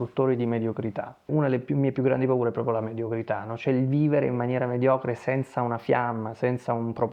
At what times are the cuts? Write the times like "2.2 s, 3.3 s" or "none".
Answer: 1.3 s